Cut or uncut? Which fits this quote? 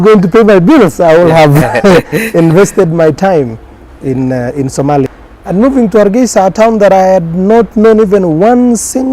cut